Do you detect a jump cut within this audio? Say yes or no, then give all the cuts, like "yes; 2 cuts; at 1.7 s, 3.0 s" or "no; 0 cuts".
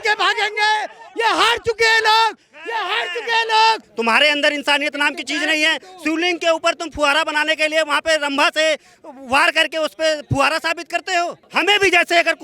yes; 2 cuts; at 3.9 s, 11.4 s